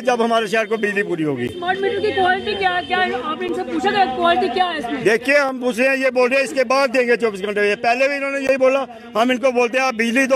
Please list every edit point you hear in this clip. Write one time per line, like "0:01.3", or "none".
none

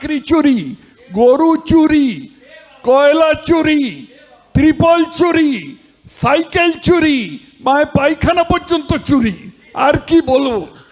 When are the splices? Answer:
none

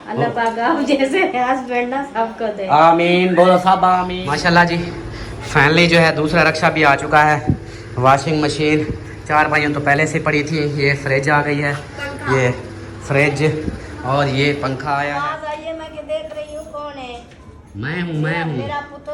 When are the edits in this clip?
0:04.2
0:15.1

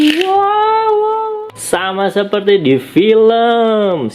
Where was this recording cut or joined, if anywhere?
0:01.2

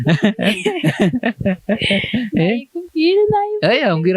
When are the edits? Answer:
none

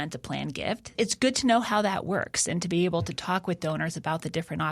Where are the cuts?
0:00.9

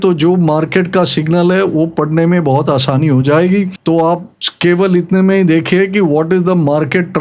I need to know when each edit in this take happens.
none

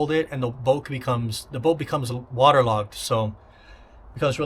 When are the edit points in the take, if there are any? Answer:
none

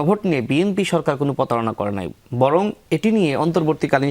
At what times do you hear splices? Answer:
none

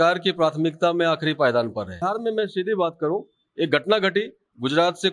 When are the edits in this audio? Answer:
0:02.0

